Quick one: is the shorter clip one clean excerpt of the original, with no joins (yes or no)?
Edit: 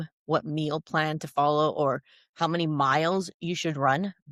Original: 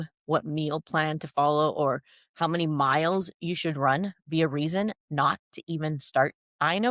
yes